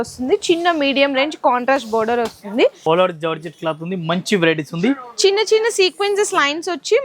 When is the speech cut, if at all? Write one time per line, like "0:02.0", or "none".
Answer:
0:02.8